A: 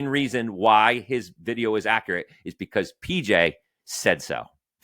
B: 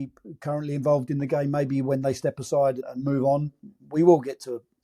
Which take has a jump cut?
A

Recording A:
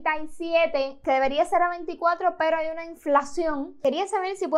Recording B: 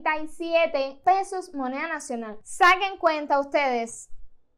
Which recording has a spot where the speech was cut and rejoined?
A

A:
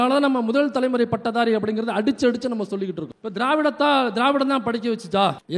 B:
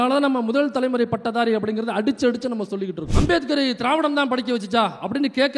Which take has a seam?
B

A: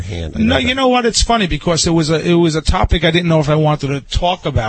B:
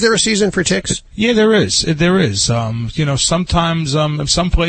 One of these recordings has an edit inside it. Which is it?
B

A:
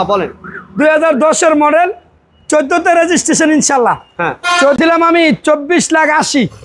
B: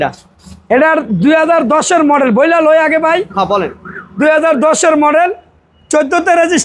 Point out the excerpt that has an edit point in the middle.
A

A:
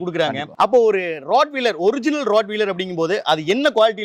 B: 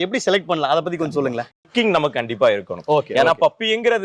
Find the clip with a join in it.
B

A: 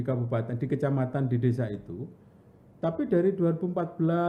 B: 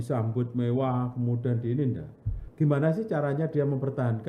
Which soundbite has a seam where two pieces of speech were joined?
B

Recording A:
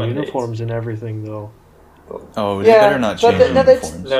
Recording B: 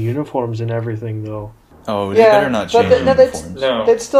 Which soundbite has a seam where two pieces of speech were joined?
B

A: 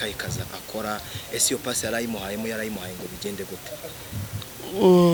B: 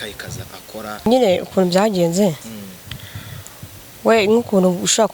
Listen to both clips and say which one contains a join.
B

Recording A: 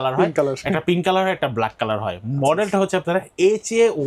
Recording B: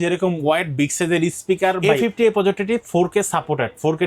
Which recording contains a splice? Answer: B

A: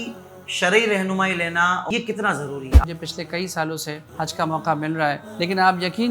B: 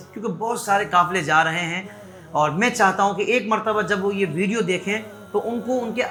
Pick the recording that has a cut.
A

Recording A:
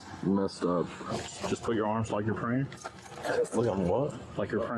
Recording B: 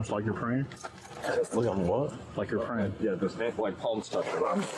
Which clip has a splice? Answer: A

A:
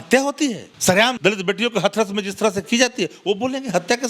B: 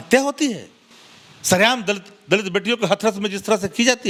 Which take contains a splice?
A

